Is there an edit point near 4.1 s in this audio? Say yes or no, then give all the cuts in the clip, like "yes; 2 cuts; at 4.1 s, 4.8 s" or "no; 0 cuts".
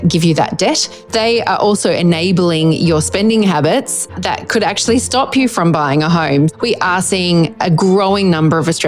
no; 2 cuts; at 0.9 s, 6.5 s